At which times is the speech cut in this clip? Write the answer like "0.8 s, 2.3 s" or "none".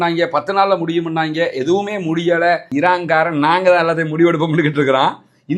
2.7 s